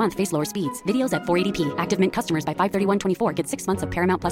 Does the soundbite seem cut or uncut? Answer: uncut